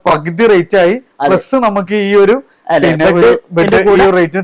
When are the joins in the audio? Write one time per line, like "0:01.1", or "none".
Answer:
none